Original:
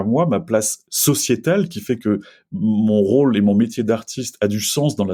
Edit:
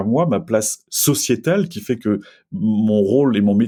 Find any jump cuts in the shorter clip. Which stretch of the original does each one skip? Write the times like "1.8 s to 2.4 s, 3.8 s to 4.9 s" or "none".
none